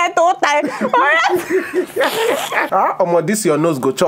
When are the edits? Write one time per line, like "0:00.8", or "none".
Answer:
0:02.7